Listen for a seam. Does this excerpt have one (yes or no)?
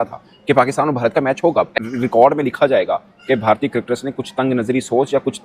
yes